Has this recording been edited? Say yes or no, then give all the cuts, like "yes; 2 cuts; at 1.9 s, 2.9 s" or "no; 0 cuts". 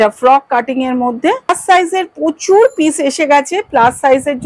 yes; 1 cut; at 1.5 s